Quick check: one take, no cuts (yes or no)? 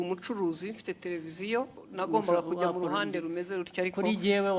no